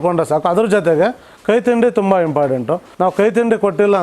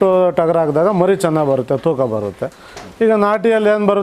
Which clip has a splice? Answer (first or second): first